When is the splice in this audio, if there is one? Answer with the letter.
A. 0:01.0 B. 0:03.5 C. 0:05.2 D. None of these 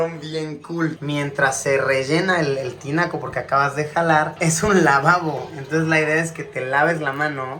A